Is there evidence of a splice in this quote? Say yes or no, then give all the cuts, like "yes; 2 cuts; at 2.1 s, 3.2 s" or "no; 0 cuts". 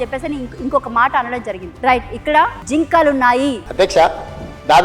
yes; 3 cuts; at 1.6 s, 2.6 s, 3.6 s